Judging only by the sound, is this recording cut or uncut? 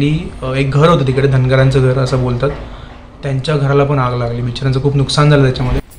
uncut